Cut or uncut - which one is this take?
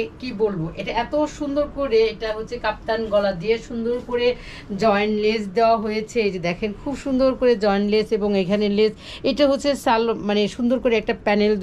uncut